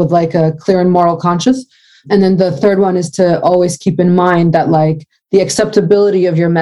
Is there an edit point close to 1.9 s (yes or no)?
no